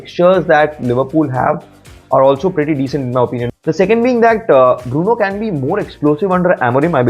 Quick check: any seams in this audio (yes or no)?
yes